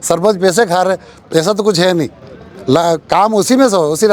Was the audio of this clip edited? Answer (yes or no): no